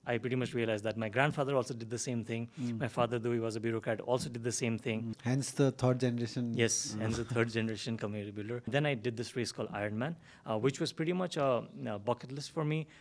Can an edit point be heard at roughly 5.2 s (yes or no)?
yes